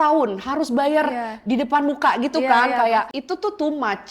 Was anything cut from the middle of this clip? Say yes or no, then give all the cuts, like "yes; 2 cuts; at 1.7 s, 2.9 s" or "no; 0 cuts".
yes; 1 cut; at 3.2 s